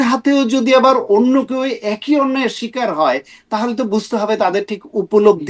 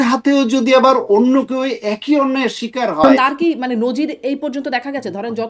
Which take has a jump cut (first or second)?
second